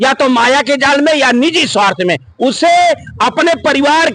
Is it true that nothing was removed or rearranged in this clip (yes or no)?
yes